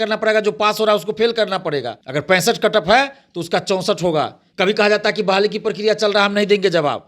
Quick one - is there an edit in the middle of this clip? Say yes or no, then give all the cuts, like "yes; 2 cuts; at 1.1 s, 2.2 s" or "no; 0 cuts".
yes; 2 cuts; at 2.0 s, 4.4 s